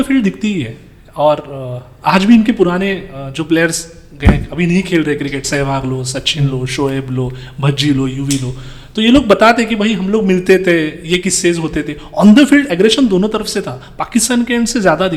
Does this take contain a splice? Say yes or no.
no